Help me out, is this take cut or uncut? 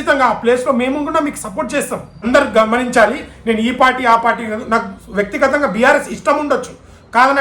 cut